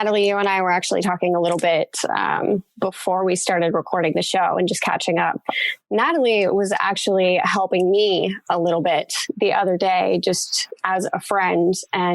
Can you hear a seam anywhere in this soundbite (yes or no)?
yes